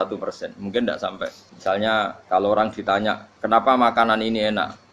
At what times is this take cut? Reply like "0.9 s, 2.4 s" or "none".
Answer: 1.5 s, 2.2 s